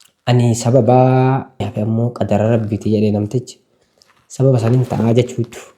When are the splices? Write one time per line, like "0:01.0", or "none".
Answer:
0:01.7